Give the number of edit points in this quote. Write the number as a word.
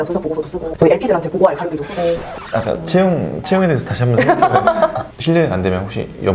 one